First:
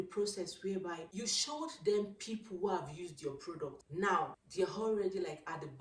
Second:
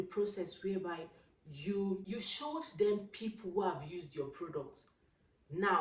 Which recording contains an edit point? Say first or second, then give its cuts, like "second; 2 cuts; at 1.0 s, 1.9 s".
first; 3 cuts; at 1.1 s, 3.8 s, 4.4 s